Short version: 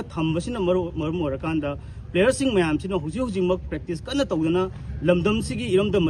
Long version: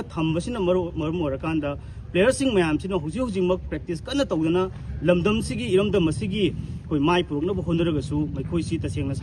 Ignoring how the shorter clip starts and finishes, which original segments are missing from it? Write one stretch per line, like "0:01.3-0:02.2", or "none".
none